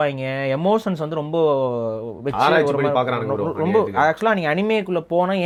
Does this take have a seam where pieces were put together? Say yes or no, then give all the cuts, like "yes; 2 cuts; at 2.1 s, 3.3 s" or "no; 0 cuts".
no; 0 cuts